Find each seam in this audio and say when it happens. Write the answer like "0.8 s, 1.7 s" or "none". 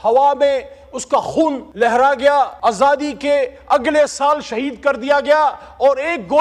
1.6 s, 2.5 s